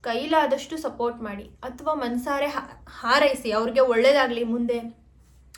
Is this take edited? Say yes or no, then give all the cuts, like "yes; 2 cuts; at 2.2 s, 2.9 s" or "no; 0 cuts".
no; 0 cuts